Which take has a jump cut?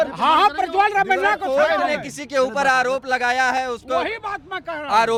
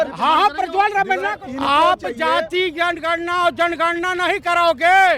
second; 1 cut; at 1.3 s

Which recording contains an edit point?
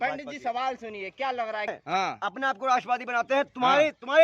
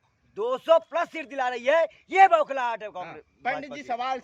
first; 1 cut; at 1.8 s

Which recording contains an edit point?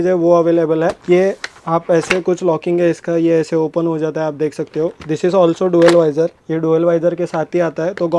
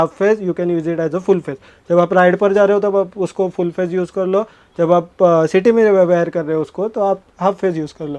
first; 2 cuts; at 1.0 s, 6.4 s

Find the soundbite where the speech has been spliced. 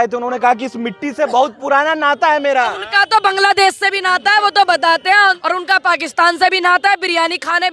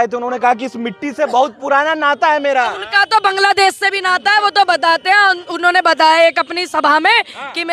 first; 1 cut; at 5.4 s

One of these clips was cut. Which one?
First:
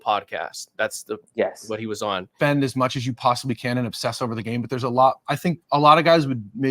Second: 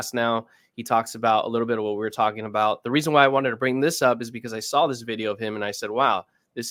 first; 1 cut; at 2.3 s

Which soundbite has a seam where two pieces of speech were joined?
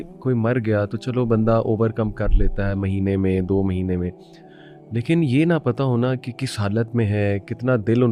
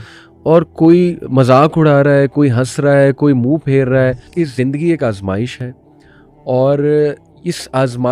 second; 1 cut; at 4.3 s

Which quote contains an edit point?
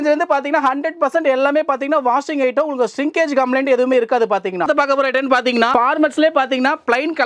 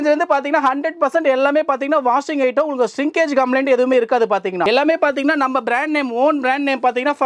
first; 1 cut; at 4.6 s

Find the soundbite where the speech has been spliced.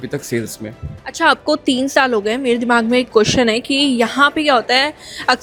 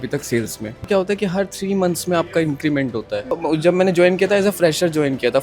second; 2 cuts; at 0.9 s, 3.2 s

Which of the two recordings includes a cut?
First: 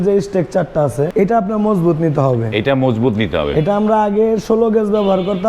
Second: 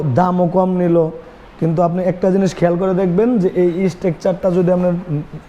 first; 1 cut; at 1.1 s

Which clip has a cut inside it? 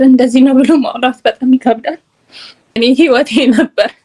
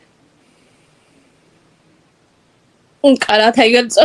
first; 1 cut; at 2.8 s

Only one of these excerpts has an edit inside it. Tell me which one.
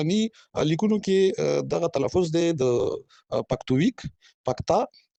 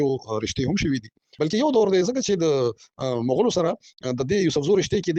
second; 1 cut; at 1.2 s

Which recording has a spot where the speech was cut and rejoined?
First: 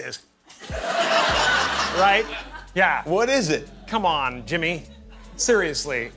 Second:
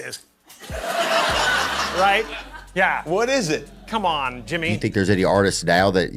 second; 1 cut; at 4.7 s

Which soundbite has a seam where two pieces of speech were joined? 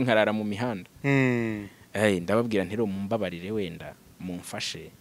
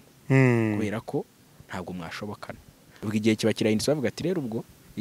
second; 1 cut; at 2.9 s

